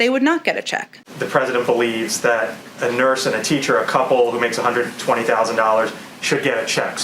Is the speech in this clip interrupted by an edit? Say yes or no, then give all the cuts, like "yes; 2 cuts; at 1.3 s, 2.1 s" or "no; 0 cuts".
yes; 1 cut; at 1.0 s